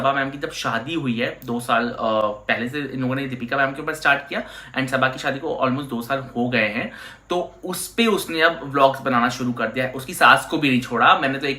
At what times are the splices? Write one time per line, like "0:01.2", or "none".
none